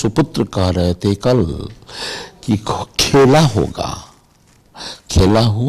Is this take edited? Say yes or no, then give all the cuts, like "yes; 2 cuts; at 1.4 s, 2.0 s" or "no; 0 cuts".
no; 0 cuts